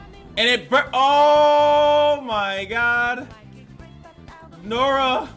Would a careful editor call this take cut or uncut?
uncut